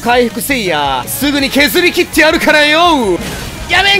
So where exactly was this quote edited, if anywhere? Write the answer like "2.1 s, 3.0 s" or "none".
1.1 s, 3.2 s